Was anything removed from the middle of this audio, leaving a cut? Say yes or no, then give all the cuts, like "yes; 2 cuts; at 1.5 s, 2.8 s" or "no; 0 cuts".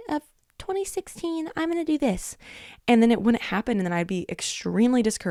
no; 0 cuts